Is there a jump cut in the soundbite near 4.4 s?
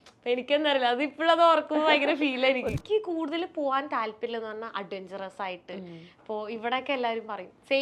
no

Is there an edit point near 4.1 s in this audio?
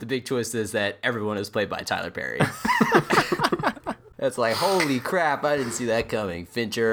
yes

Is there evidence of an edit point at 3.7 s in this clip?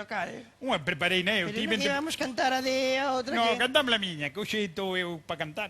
yes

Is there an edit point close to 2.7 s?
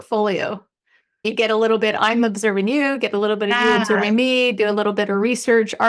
no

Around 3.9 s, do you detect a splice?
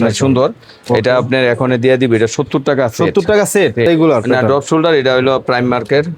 yes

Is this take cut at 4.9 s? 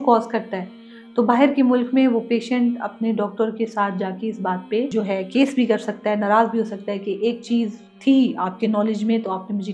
yes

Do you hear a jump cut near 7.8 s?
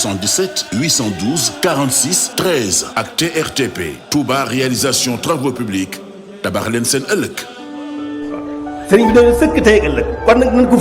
yes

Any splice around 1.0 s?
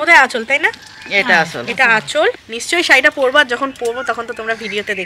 no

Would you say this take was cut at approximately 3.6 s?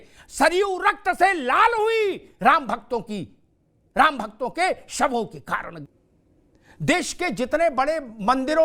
no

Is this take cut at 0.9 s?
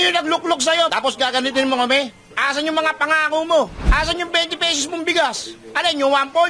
yes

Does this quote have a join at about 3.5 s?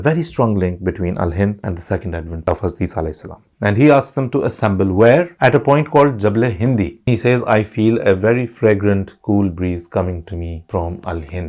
yes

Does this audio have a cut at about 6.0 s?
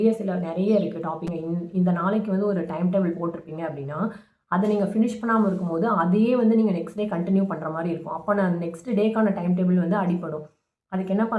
no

